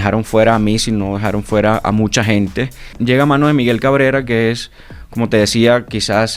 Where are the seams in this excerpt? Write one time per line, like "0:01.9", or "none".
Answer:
0:02.9